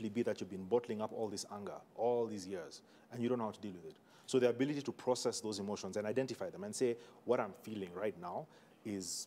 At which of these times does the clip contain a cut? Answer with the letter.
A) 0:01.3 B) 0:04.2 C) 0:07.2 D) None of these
D